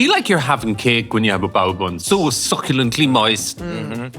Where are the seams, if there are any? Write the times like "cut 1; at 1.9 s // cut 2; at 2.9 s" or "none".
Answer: cut 1; at 2.0 s